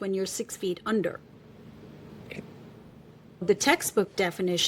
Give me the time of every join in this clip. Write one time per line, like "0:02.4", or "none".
0:03.4